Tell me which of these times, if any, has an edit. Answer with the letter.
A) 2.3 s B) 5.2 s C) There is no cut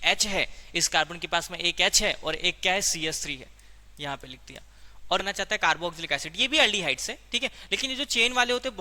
B